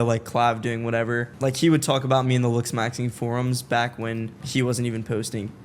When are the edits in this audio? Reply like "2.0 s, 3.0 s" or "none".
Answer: 1.3 s, 4.4 s